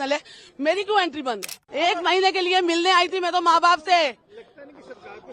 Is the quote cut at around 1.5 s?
yes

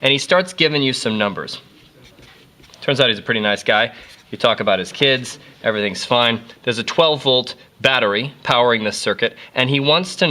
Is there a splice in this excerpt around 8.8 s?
yes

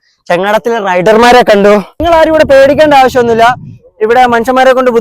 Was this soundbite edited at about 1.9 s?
yes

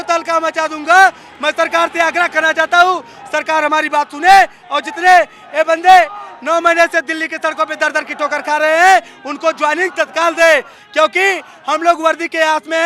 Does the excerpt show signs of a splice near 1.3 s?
no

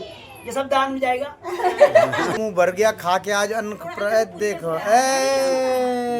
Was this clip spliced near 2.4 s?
yes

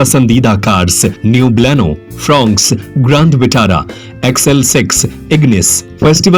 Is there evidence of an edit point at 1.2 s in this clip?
yes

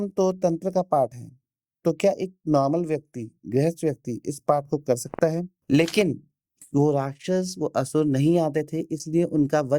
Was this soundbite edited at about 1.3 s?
no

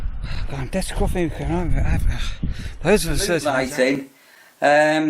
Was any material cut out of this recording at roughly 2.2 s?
no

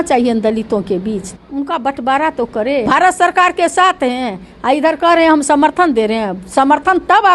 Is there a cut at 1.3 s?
yes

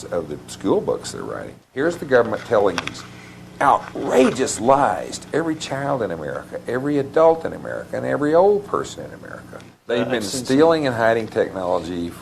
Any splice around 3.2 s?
no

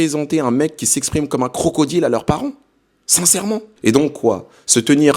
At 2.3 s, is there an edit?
no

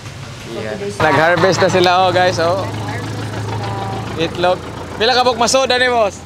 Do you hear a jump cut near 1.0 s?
yes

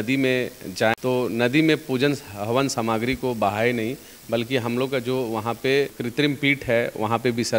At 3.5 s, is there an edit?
no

